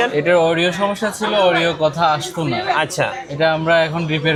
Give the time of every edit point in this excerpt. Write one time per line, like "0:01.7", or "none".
none